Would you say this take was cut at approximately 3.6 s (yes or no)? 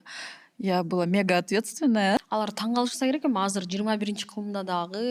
no